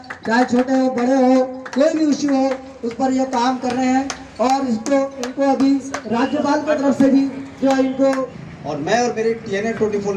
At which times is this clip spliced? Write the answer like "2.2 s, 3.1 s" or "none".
8.3 s